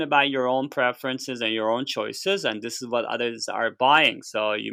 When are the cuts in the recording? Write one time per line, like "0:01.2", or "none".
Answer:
none